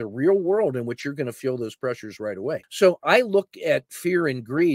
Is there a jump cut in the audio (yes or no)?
yes